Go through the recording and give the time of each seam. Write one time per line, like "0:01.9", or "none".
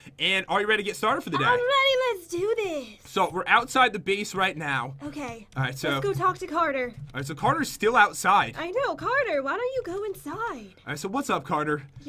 0:04.5